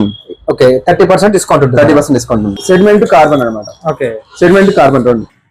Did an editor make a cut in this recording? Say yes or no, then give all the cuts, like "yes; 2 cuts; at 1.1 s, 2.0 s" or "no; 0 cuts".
yes; 1 cut; at 2.5 s